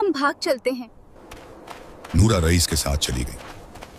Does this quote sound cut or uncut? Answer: uncut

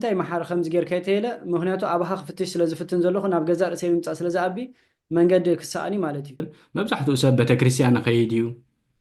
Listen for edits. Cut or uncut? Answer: cut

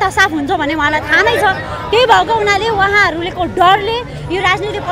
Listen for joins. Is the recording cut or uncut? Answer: uncut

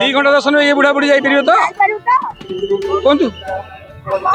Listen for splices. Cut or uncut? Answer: uncut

